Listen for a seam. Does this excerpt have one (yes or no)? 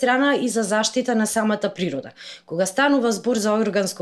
no